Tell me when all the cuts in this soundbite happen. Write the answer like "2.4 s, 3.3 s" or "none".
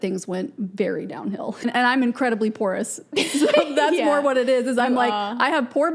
1.6 s